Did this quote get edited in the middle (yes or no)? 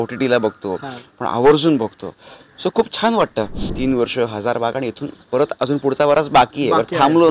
yes